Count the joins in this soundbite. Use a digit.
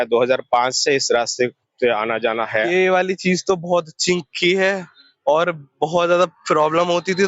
1